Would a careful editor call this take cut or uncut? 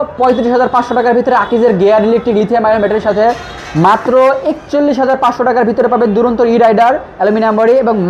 uncut